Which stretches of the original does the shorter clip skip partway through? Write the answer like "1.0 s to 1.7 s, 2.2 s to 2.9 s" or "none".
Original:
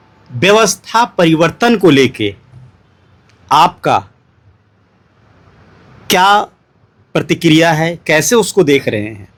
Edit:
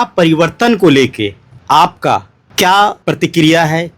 2.5 s to 3.3 s, 4.2 s to 5.9 s, 6.5 s to 7.1 s